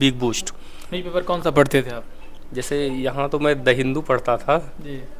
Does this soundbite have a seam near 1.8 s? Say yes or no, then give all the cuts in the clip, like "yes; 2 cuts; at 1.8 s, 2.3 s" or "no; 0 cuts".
no; 0 cuts